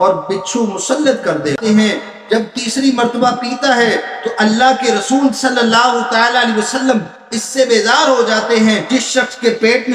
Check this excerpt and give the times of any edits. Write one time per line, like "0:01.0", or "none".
0:01.6
0:08.8